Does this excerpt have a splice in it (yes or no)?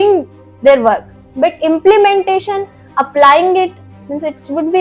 no